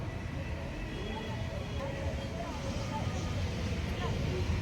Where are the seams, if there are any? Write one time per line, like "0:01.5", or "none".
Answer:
0:01.8